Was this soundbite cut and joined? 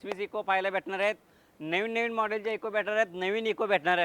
no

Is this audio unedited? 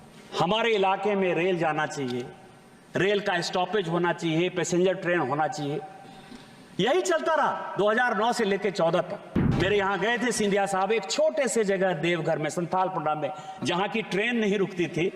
no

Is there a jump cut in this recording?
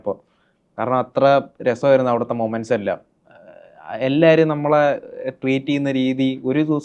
no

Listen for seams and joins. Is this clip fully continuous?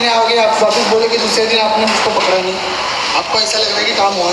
yes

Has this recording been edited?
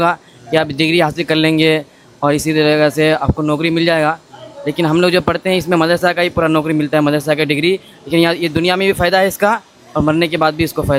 no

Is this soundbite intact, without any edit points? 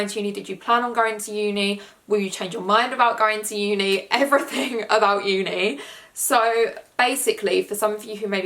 yes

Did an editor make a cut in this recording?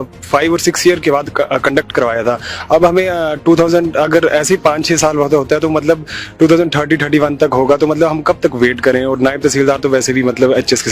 no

